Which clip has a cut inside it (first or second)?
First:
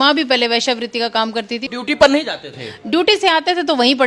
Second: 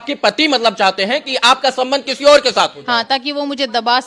first